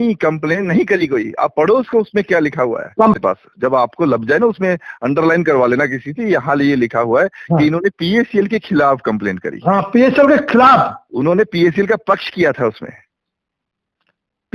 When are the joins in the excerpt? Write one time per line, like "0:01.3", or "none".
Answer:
0:03.2